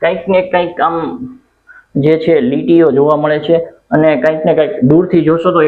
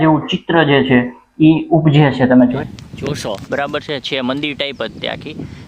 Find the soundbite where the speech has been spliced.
second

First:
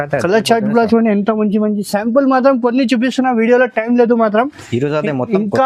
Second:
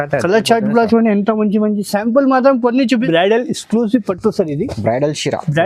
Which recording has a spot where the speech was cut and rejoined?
second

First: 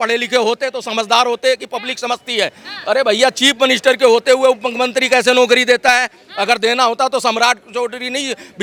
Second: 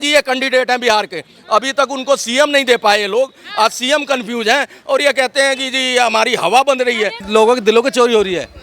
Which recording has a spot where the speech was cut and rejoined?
second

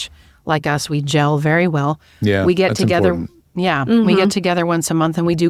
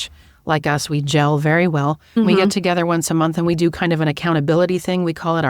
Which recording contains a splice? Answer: second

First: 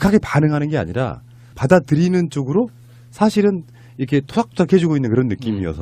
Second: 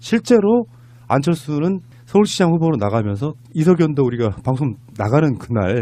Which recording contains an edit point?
first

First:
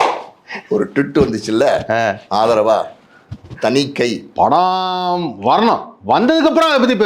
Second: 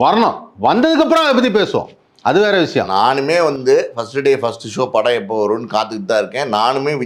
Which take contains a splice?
first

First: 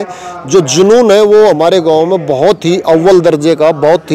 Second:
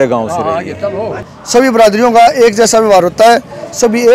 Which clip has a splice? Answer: second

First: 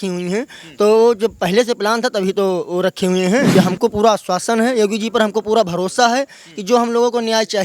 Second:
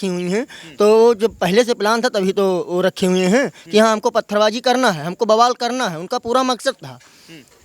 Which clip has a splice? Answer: first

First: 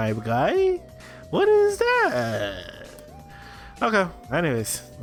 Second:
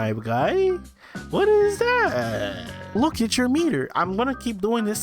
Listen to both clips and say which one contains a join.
second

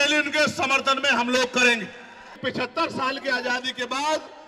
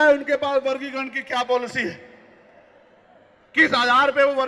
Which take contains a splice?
first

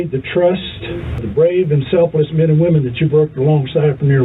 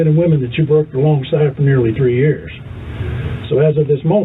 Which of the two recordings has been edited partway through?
first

